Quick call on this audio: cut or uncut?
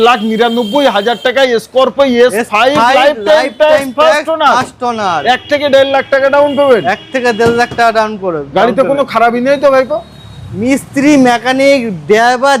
uncut